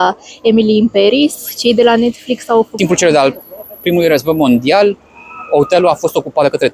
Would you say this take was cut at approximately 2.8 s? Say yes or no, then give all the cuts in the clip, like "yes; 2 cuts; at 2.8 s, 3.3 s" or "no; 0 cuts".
yes; 1 cut; at 2.8 s